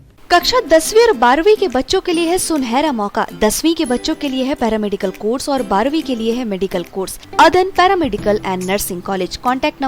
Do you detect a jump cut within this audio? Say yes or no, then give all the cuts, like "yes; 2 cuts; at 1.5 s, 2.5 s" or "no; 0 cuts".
yes; 1 cut; at 7.2 s